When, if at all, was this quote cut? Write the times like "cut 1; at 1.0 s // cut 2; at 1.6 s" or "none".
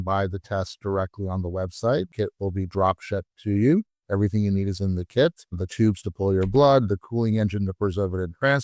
cut 1; at 2.1 s